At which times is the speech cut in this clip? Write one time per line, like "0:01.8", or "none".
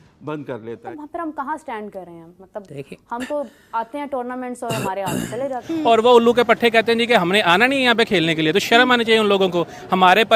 0:00.8
0:05.6